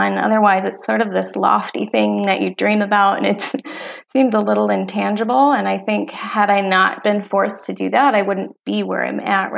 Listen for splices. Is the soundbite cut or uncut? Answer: cut